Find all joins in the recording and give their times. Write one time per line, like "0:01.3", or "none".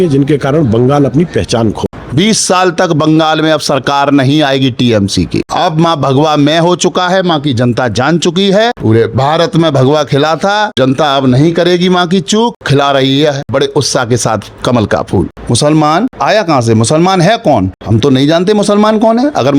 0:01.9
0:05.5
0:08.8
0:10.7
0:12.6
0:13.4
0:15.4
0:16.1
0:17.8

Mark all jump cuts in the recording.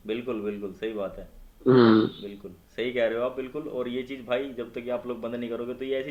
none

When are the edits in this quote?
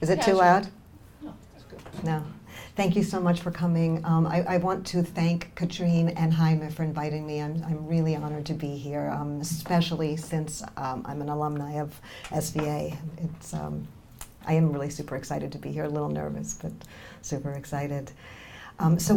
none

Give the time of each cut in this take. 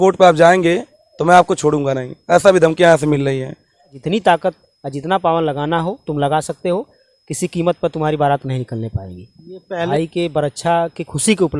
0:04.0
0:09.9

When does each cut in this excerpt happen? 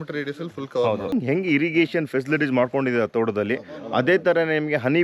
0:01.1

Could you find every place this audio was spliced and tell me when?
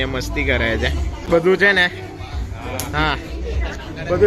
0:01.1

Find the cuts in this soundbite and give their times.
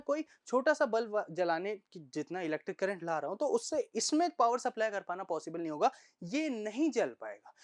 none

